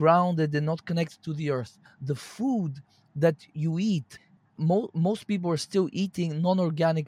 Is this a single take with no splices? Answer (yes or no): no